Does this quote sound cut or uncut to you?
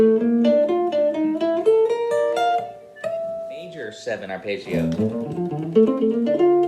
cut